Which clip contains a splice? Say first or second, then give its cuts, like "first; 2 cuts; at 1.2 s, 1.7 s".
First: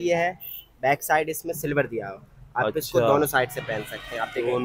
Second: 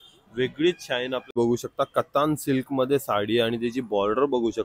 second; 1 cut; at 1.3 s